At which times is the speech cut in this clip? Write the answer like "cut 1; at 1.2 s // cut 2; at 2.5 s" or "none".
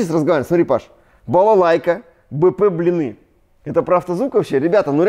none